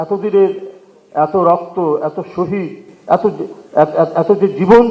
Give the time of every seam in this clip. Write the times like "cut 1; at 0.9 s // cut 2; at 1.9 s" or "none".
none